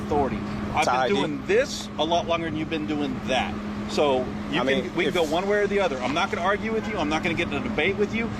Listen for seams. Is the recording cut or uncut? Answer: uncut